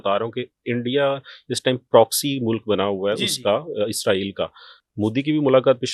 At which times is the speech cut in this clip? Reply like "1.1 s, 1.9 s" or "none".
none